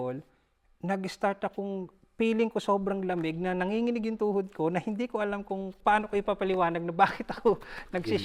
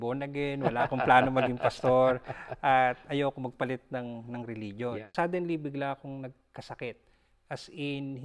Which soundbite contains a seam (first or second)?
second